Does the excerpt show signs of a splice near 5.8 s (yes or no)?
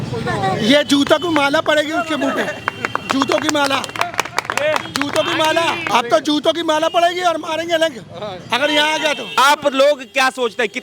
yes